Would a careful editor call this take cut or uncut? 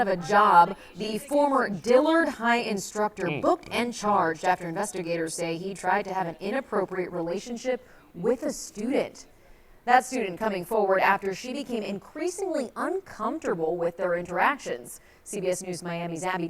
cut